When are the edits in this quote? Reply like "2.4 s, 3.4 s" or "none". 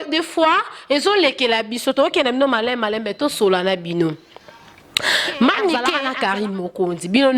6.0 s